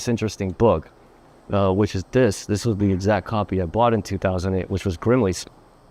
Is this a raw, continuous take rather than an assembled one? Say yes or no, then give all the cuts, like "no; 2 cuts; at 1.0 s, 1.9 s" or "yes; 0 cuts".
yes; 0 cuts